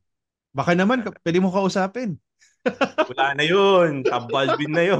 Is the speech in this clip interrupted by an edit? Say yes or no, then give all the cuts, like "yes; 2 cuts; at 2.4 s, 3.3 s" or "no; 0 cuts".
no; 0 cuts